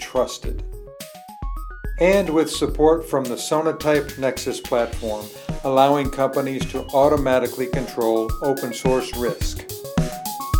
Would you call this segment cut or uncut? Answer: cut